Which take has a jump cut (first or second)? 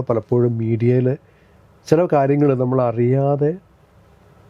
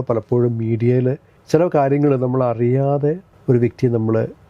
second